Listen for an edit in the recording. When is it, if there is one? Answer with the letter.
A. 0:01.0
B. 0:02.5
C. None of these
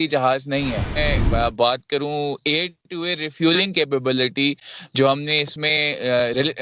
A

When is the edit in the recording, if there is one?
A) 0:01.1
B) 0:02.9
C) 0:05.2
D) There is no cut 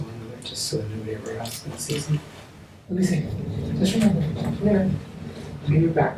B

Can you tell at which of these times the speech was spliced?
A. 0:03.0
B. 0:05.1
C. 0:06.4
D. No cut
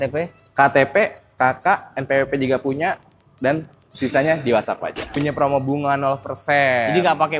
B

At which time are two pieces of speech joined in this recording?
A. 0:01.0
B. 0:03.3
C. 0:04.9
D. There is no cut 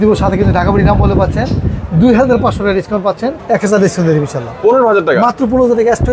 B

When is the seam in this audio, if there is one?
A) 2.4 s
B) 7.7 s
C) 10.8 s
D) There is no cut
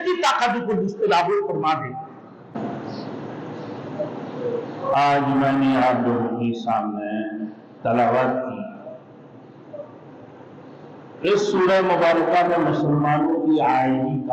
A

